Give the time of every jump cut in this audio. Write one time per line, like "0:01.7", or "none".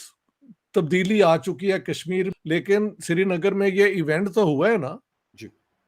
0:02.3

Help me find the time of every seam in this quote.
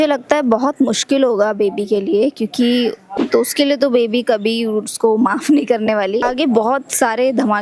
0:03.1
0:06.3

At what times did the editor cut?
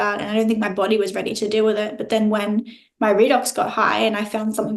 none

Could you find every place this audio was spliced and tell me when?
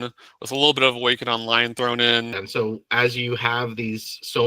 0:02.4

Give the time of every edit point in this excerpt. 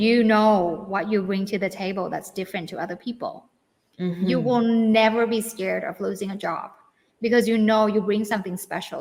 none

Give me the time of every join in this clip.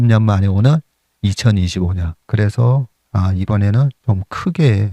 0:02.1
0:04.0

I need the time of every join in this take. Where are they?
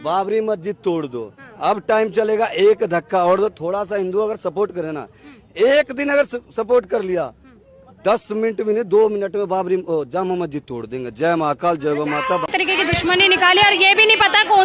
none

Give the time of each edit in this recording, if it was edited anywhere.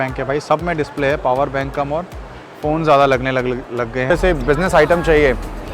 0:04.0

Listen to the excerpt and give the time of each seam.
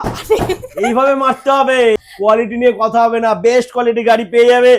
none

